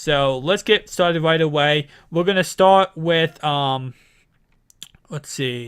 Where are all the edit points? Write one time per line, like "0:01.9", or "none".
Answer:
0:02.0